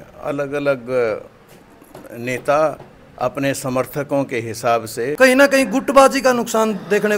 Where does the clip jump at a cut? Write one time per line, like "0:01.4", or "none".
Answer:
0:05.1

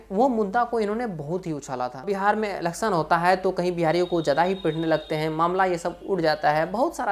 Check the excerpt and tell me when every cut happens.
0:02.0

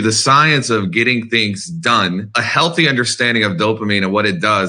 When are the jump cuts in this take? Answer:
0:02.4

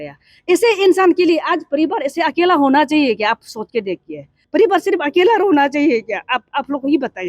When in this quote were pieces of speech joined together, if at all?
0:04.4

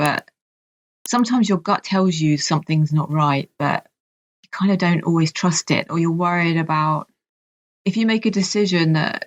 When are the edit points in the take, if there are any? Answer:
none

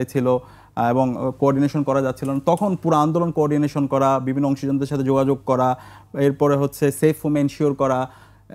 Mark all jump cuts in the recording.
none

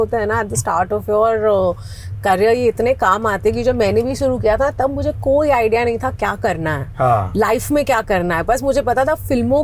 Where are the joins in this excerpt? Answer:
none

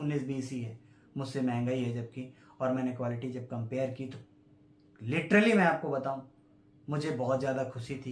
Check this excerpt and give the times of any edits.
none

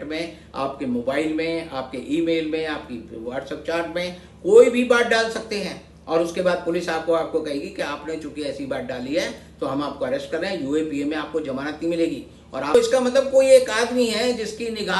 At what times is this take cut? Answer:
0:12.7

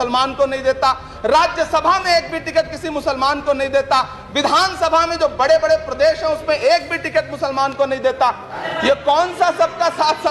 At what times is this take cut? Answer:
0:08.6

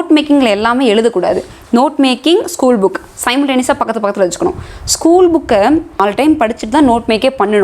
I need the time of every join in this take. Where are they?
0:06.0

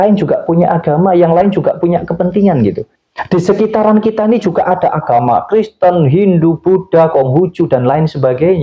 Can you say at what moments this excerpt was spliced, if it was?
0:02.9

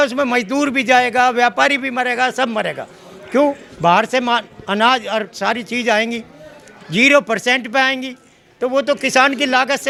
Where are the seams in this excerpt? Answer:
none

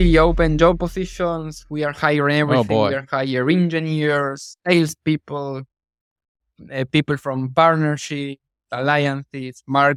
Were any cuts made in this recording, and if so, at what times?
none

